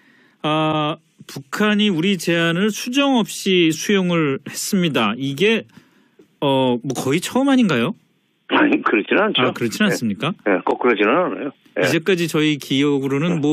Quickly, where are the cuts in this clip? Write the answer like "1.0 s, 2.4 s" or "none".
none